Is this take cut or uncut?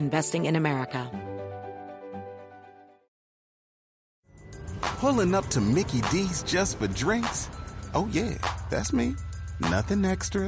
cut